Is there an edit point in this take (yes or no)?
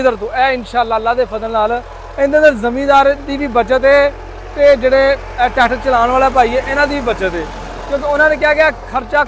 no